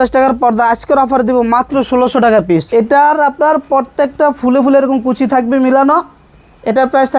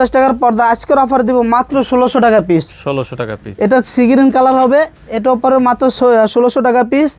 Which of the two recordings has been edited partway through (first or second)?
first